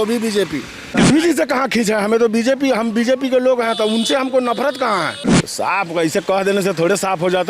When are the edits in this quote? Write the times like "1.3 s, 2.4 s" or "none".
0.9 s, 5.2 s